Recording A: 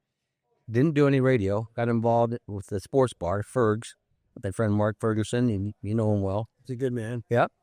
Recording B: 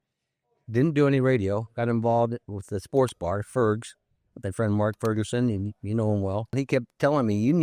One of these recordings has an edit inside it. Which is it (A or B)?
B